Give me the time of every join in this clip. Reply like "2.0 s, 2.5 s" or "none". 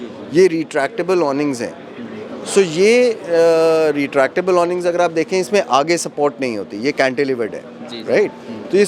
none